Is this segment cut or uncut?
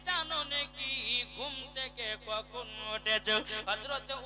uncut